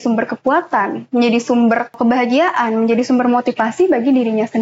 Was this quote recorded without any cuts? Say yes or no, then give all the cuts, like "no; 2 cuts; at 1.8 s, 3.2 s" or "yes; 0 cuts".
no; 1 cut; at 2.0 s